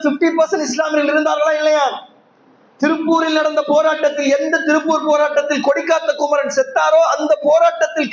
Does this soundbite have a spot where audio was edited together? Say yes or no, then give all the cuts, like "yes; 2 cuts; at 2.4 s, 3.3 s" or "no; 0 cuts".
no; 0 cuts